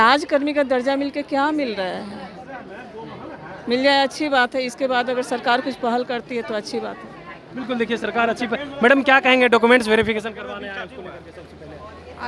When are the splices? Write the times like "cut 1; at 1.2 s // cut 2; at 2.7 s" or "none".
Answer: none